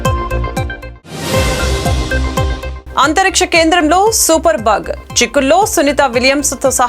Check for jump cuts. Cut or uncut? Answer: cut